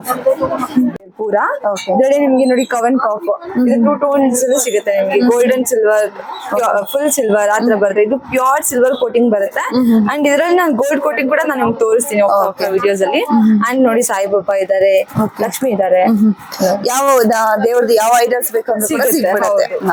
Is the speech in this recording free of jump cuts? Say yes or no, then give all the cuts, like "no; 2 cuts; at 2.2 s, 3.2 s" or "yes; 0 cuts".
yes; 0 cuts